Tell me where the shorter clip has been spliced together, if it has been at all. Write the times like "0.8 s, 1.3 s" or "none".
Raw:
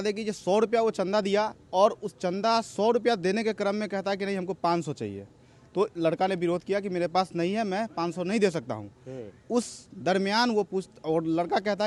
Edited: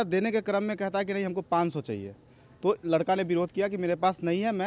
none